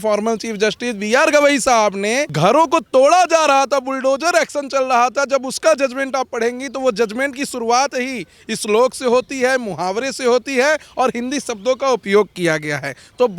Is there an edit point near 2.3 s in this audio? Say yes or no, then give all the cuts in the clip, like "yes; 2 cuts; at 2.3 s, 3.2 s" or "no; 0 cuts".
yes; 1 cut; at 2.3 s